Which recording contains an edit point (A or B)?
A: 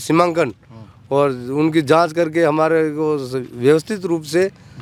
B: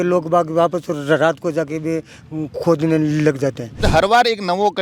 B